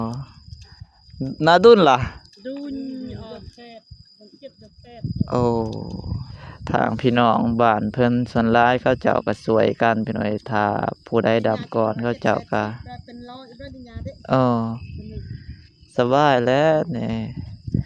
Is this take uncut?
no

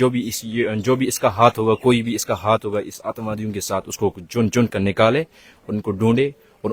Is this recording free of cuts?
yes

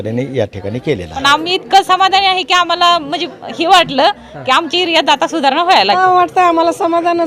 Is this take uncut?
no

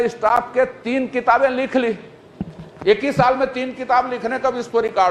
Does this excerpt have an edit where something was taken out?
no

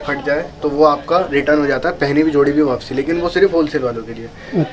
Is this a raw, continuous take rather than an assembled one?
yes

